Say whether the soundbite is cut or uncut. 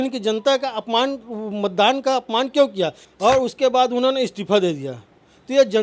cut